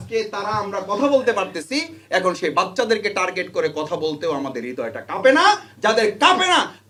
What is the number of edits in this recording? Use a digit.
0